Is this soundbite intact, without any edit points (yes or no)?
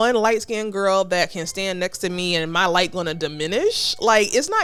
yes